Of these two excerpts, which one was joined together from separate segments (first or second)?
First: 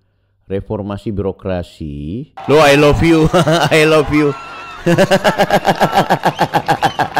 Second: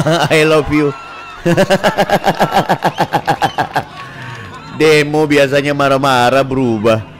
first